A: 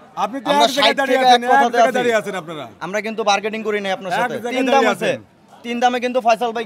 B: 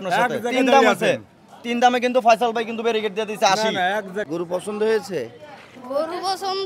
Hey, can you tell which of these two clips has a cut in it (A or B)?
B